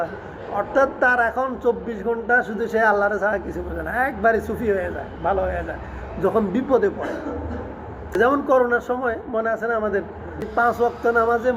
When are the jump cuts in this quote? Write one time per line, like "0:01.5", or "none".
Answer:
0:08.1
0:10.5